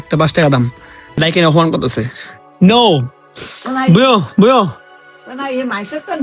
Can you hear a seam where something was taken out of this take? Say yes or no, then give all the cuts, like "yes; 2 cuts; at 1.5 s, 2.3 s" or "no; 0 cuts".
yes; 1 cut; at 1.2 s